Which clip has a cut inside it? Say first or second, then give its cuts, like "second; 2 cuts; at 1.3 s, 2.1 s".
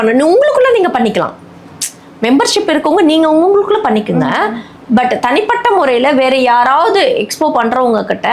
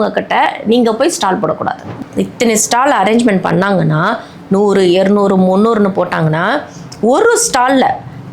second; 1 cut; at 1.8 s